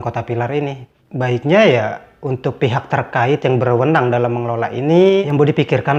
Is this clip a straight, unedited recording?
yes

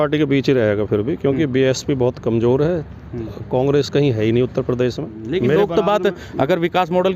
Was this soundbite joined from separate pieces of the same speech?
yes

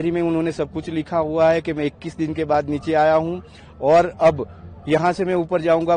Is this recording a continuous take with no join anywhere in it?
yes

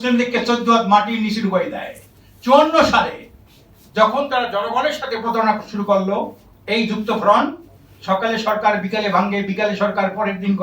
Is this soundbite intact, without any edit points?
yes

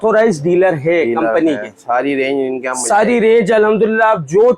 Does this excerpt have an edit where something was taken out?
no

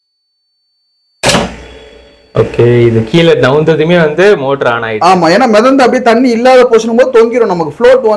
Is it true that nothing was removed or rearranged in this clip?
yes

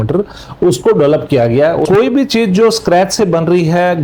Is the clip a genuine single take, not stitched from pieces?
no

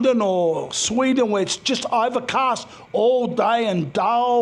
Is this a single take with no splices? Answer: yes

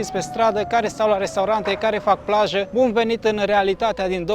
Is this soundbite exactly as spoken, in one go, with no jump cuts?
no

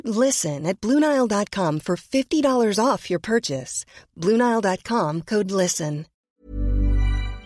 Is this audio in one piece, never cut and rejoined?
no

